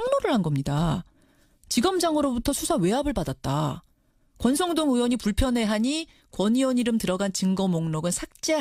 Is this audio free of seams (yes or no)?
yes